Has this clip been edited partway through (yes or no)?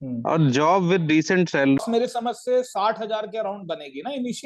yes